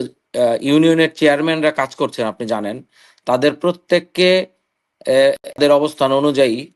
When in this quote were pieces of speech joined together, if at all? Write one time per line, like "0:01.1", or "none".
0:05.6